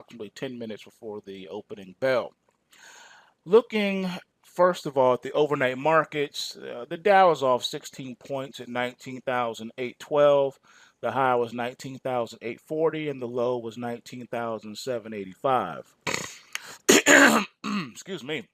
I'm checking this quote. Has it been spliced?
yes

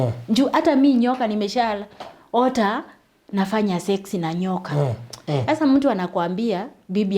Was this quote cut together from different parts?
yes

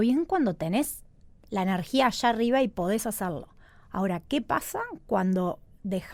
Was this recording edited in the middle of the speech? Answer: no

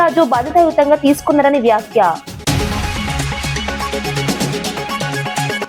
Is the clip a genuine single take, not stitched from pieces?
yes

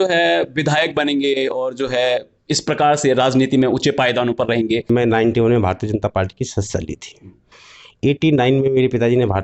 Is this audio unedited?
no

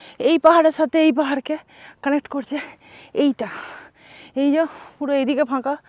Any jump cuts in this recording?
no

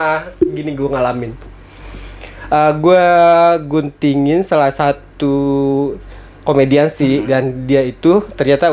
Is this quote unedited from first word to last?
yes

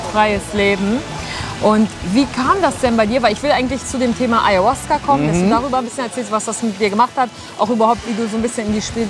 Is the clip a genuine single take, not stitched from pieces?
yes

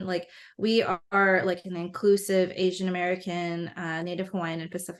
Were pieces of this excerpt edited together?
no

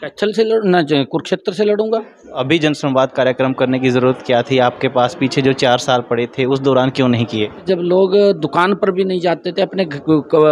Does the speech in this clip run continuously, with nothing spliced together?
no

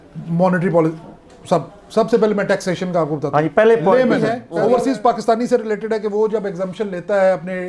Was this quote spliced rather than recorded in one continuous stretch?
yes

